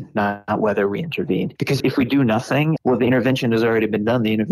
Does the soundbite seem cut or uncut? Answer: cut